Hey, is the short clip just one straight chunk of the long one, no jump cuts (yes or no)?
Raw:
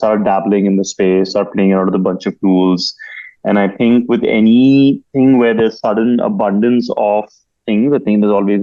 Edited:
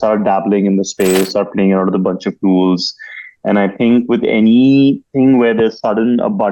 yes